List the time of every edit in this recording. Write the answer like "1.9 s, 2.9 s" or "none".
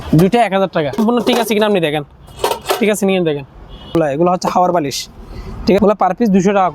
1.0 s, 3.9 s, 5.8 s